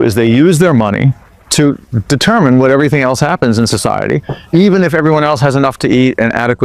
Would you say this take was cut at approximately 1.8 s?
no; 1 cut; at 4.3 s

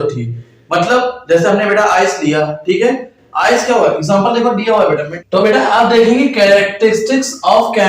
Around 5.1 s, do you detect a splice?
yes; 1 cut; at 5.1 s

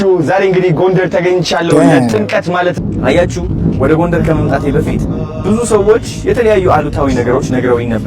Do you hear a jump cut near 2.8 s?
yes; 1 cut; at 2.8 s

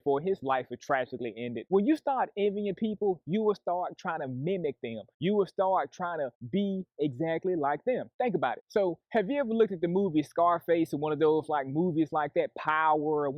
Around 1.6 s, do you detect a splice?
yes; 1 cut; at 1.6 s

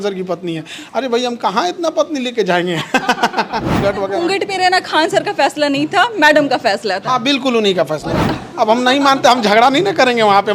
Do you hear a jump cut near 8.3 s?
yes; 2 cuts; at 3.8 s, 8.3 s

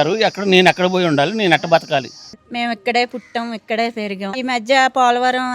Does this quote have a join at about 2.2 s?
yes; 2 cuts; at 2.2 s, 4.4 s

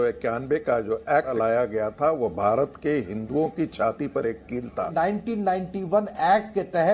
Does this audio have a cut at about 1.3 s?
yes; 2 cuts; at 1.3 s, 4.9 s

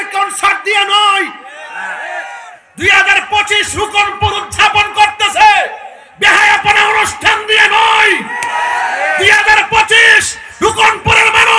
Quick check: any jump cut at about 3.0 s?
no; 0 cuts

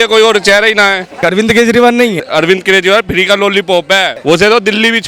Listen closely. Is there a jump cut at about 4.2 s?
yes; 3 cuts; at 1.2 s, 2.2 s, 4.2 s

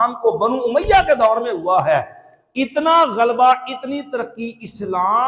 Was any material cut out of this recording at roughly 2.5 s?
no; 0 cuts

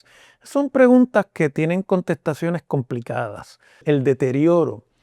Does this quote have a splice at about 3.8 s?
yes; 1 cut; at 3.8 s

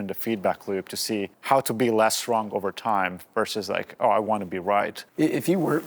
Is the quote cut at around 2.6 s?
no; 2 cuts; at 1.3 s, 5.0 s

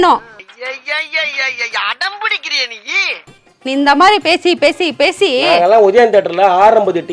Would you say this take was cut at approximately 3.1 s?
yes; 1 cut; at 3.1 s

